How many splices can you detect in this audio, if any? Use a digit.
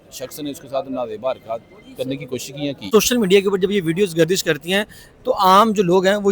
1